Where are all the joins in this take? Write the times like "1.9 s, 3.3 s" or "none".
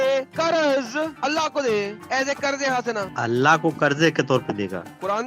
none